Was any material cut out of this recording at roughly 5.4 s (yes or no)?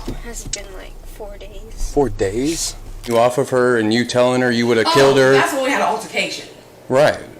no